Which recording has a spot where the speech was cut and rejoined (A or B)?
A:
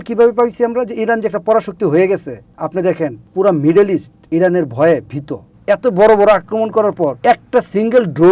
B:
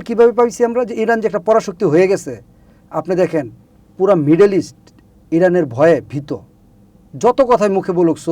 A